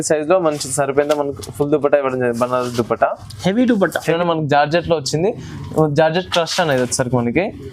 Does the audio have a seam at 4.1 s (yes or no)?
yes